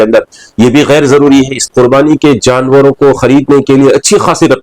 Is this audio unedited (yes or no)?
no